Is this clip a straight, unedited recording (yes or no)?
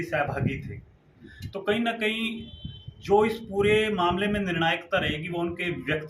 yes